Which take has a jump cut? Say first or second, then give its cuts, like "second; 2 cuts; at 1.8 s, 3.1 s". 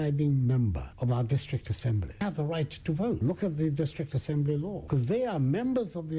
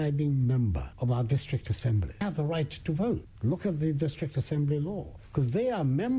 first; 2 cuts; at 3.2 s, 4.8 s